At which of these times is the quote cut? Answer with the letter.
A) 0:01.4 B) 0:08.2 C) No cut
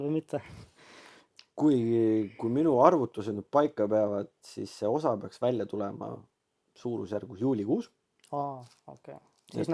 C